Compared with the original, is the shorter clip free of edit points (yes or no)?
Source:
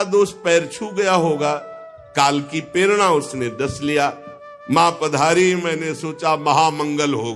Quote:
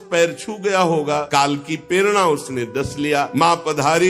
no